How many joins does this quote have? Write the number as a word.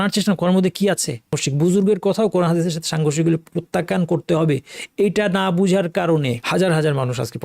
two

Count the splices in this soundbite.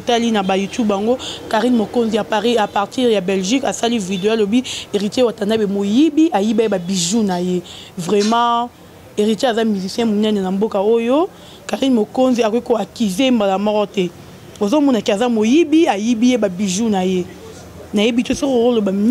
zero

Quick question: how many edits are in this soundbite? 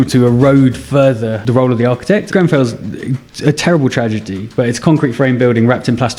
two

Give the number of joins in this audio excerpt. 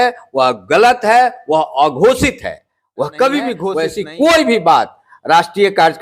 one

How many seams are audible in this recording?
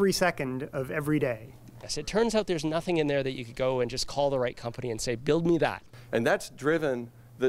two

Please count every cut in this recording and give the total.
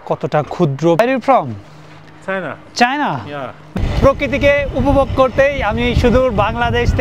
two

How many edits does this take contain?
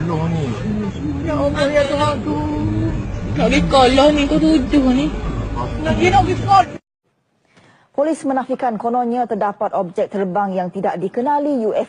zero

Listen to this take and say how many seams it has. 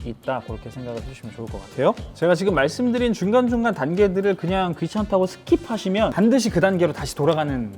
two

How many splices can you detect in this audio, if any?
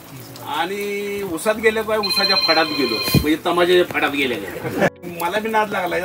one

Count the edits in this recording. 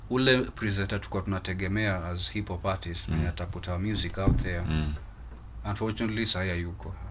zero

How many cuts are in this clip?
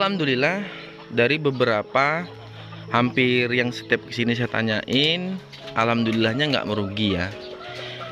zero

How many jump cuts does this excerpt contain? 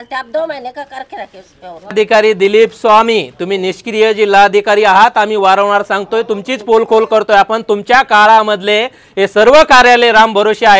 one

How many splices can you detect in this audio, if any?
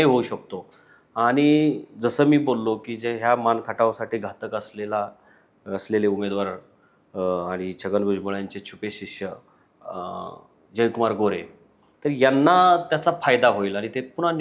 zero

